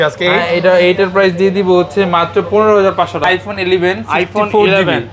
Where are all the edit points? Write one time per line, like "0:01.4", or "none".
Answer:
0:03.2